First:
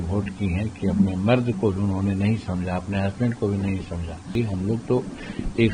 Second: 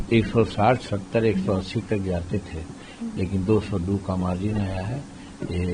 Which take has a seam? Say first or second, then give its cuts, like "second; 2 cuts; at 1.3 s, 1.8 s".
first; 1 cut; at 4.3 s